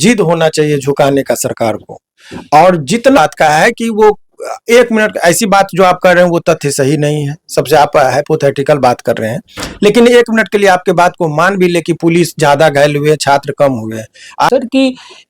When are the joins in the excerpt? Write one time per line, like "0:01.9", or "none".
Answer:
0:03.2
0:14.5